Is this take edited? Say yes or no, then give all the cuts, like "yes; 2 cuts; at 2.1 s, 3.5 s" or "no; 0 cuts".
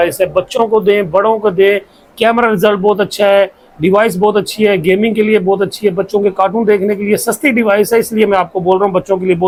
no; 0 cuts